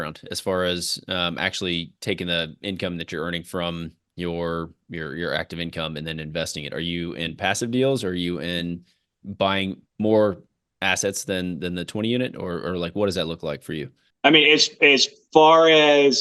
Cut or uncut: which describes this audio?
uncut